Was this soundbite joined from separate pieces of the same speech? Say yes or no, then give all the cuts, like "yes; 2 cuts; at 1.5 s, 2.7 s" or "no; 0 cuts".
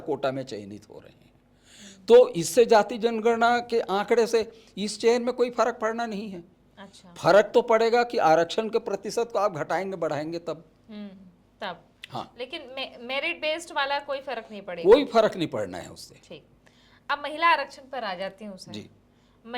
no; 0 cuts